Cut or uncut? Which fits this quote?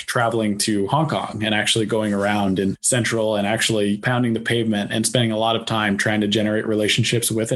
cut